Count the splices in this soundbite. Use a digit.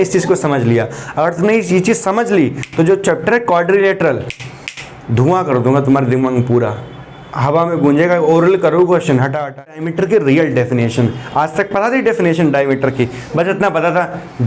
1